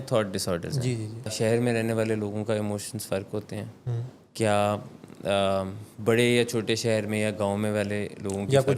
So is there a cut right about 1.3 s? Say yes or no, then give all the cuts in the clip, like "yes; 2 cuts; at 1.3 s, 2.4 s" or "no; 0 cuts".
yes; 1 cut; at 1.3 s